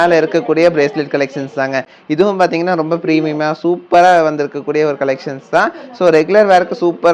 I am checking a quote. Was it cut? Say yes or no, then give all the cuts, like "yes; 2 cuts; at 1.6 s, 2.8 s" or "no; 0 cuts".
no; 0 cuts